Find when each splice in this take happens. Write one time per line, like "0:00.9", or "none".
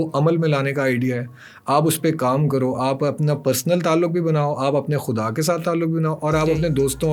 none